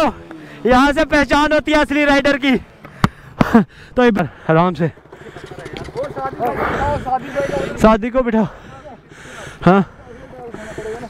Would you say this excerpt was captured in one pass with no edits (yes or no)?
no